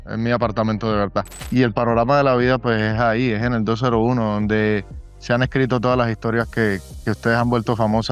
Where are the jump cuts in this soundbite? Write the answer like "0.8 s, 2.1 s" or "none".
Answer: 1.4 s